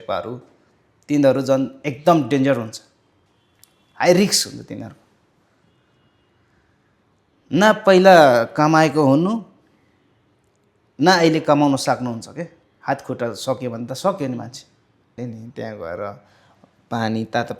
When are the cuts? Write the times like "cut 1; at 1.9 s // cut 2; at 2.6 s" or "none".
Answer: cut 1; at 15.2 s